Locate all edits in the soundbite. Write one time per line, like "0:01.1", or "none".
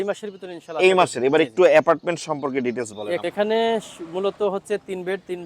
0:03.2